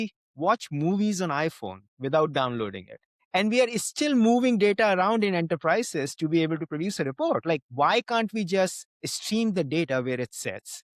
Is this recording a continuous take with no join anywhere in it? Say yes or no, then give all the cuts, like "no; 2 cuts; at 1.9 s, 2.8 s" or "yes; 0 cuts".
yes; 0 cuts